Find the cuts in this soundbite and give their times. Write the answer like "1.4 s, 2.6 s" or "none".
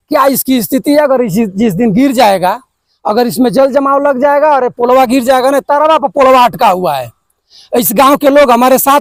none

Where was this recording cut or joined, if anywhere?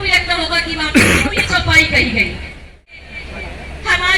2.9 s

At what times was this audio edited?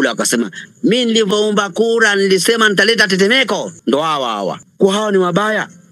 3.7 s, 4.6 s

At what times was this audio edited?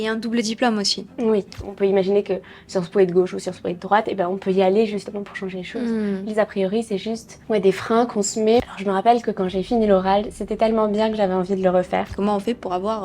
1.7 s, 8.3 s, 12.1 s

